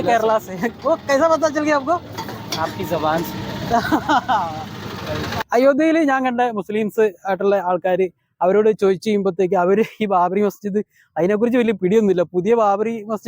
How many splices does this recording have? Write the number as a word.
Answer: one